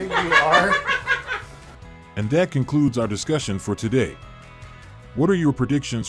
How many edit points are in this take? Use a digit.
0